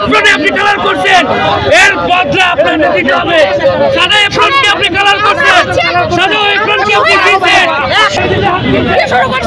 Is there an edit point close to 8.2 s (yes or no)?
yes